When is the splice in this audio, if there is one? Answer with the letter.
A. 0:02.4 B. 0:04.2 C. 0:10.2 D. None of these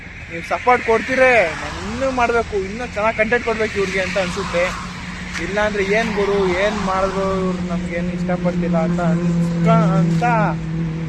D